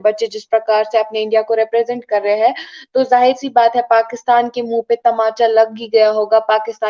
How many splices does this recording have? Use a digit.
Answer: 0